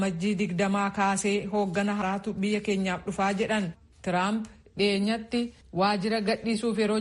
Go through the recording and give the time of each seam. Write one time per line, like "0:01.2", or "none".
0:02.0